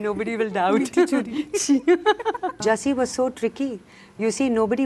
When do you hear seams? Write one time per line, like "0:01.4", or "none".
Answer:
0:02.6